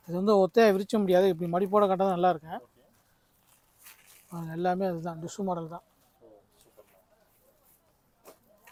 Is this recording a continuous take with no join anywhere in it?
yes; 0 cuts

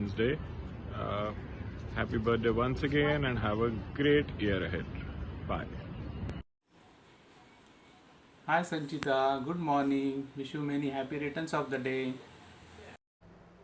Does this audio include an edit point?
no; 0 cuts

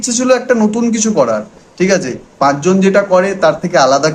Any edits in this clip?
no; 0 cuts

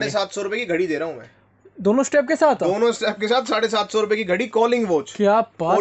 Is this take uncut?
yes; 0 cuts

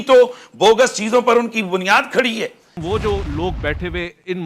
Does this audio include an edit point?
yes; 1 cut; at 2.7 s

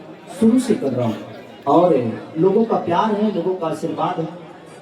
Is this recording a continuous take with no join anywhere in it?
yes; 0 cuts

